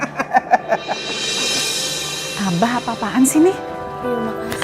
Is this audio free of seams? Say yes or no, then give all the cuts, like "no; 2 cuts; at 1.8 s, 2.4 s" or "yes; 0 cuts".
no; 1 cut; at 3.7 s